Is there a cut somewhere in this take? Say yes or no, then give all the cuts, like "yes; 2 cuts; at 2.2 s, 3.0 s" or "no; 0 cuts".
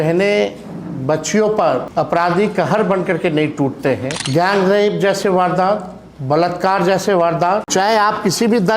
yes; 3 cuts; at 1.9 s, 4.2 s, 7.7 s